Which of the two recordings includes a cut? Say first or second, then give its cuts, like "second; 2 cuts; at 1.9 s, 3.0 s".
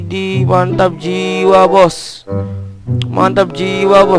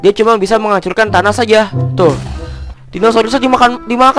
second; 1 cut; at 2.6 s